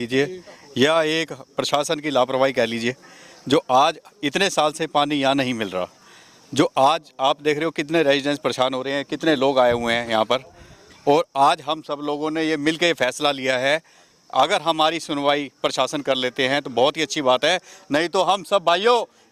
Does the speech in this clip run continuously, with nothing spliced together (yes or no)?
yes